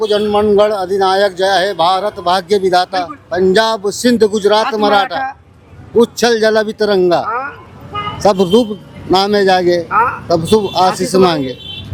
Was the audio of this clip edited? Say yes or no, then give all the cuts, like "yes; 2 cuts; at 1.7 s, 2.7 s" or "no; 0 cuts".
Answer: no; 0 cuts